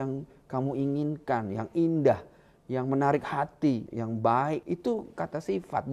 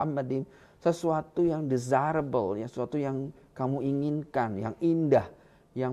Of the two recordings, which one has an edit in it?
first; 2 cuts; at 3.9 s, 4.6 s

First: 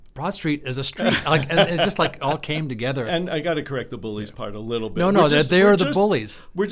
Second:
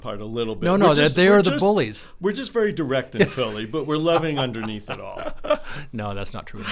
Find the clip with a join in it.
first; 1 cut; at 3.1 s

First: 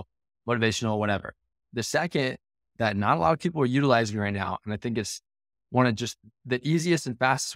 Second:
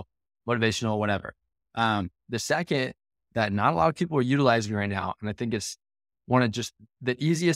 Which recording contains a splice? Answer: first; 1 cut; at 1.6 s

